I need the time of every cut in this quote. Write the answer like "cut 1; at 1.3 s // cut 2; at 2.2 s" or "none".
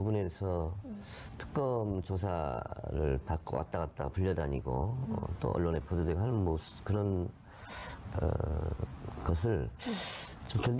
cut 1; at 7.3 s